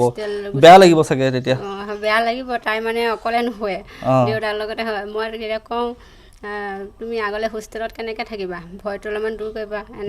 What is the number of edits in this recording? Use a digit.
0